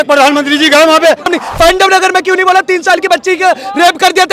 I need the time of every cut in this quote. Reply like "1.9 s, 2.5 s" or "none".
1.3 s